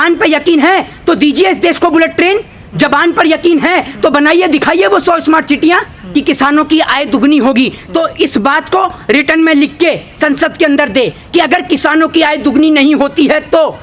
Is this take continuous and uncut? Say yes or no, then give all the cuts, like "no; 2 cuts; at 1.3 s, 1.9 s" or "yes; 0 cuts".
no; 1 cut; at 6.0 s